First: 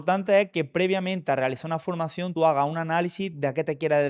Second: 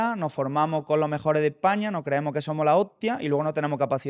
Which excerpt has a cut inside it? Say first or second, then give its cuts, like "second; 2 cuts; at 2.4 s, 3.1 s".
first; 1 cut; at 2.3 s